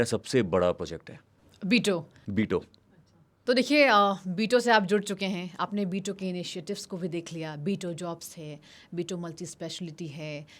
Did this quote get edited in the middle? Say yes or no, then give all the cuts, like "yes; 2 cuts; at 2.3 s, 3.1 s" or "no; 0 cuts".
no; 0 cuts